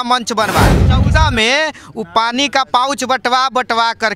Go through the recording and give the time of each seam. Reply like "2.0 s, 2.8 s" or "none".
0.9 s